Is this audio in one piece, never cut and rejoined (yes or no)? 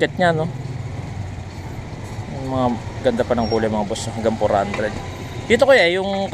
yes